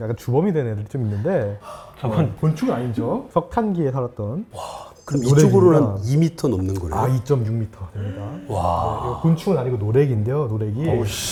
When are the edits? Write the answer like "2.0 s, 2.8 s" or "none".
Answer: none